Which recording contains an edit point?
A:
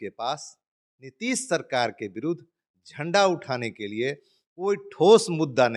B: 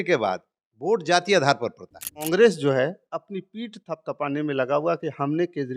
B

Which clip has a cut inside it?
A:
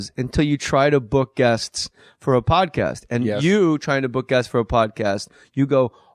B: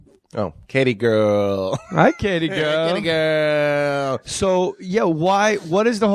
B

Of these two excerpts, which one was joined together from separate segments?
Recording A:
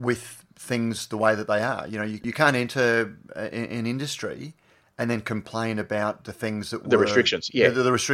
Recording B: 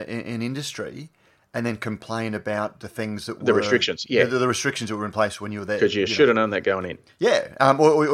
A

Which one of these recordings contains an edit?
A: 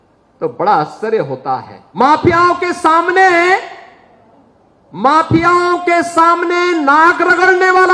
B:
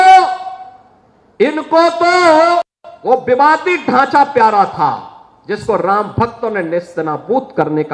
A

